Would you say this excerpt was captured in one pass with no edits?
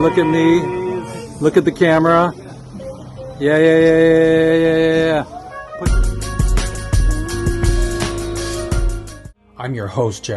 no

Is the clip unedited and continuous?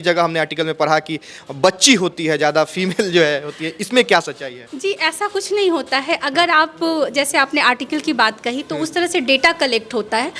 yes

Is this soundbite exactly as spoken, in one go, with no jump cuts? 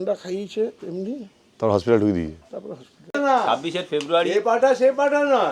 no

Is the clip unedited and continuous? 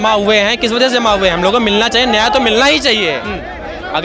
yes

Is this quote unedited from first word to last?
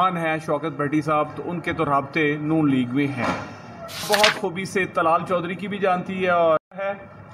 no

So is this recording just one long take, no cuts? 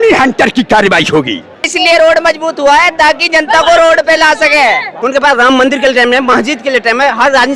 no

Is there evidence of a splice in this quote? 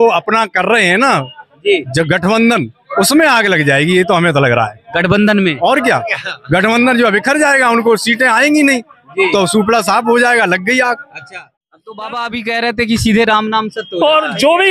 yes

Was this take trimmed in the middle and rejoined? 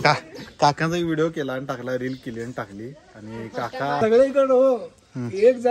yes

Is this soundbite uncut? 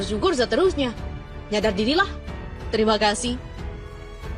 yes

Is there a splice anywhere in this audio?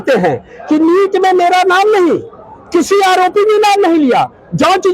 no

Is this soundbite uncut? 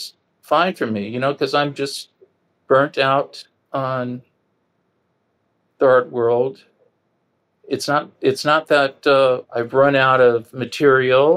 yes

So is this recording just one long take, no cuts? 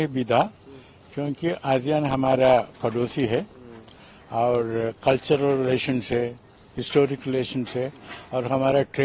yes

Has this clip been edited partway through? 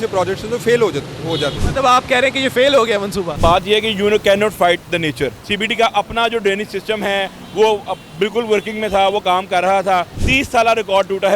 yes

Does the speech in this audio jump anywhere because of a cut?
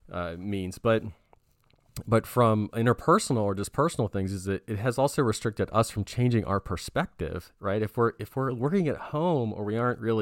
no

